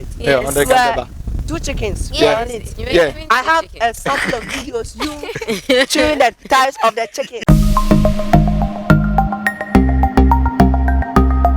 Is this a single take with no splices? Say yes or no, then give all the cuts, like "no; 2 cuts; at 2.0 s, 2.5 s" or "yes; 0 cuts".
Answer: no; 1 cut; at 7.5 s